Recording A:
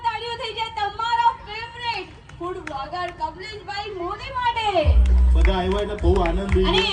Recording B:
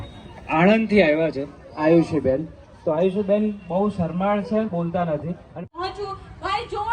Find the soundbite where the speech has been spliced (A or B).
B